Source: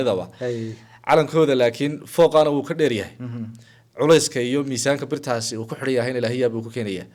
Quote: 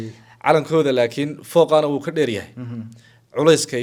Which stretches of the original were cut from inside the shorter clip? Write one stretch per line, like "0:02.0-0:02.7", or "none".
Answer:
none